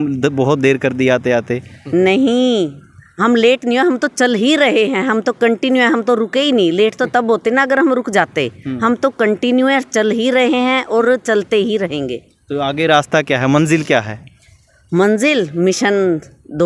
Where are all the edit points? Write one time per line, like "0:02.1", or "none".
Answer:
none